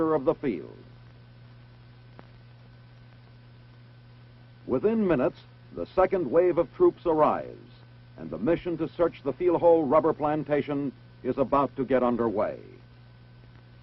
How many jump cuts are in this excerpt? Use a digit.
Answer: 1